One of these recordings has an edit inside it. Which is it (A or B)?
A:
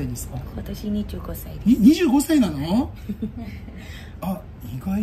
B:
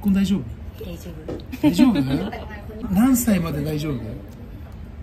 B